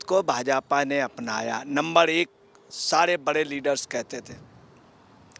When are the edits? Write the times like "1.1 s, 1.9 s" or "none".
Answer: none